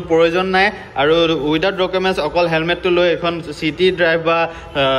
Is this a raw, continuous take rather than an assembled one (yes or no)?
yes